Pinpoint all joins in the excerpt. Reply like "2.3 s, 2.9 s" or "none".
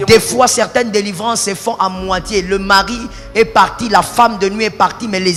none